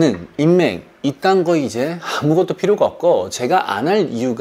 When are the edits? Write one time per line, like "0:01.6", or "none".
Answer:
none